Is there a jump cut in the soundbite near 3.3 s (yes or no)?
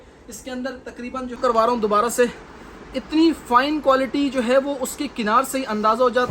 no